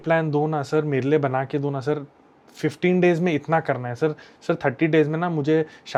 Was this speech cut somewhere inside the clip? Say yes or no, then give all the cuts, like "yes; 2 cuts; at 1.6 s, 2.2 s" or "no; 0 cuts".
no; 0 cuts